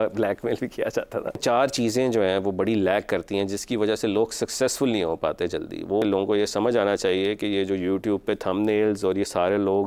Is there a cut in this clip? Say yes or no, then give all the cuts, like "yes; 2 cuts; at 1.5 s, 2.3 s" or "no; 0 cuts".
yes; 2 cuts; at 1.4 s, 6.0 s